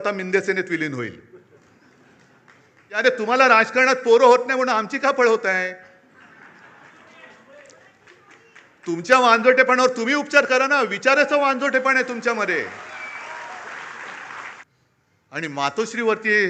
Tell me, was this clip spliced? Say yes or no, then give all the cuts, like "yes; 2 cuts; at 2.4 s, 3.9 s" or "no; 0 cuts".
yes; 2 cuts; at 3.0 s, 14.6 s